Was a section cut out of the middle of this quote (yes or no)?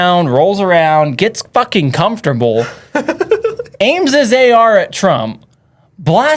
no